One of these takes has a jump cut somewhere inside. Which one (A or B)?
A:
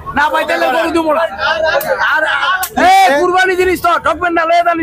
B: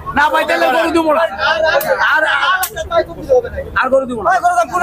A